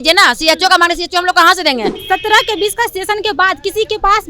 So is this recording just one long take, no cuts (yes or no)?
no